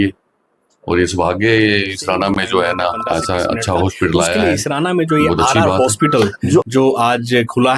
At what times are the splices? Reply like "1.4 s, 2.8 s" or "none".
4.4 s